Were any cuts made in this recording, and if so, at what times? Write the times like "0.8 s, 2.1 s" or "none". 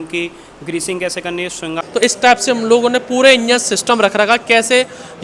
1.8 s